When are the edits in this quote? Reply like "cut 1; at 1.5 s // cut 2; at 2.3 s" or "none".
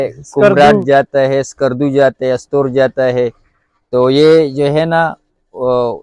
none